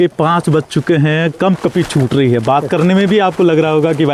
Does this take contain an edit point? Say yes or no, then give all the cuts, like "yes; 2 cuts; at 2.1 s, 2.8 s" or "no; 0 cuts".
no; 0 cuts